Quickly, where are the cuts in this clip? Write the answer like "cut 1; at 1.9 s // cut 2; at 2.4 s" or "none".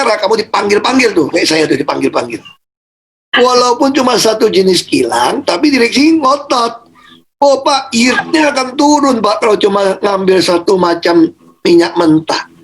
cut 1; at 3.4 s